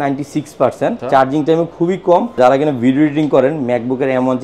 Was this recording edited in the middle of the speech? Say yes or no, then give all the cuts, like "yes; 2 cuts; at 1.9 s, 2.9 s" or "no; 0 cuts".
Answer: yes; 2 cuts; at 1.0 s, 2.4 s